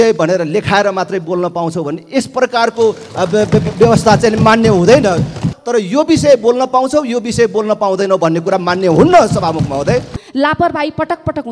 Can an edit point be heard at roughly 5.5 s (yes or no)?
yes